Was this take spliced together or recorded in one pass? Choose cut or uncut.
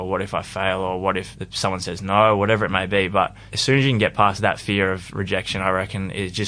cut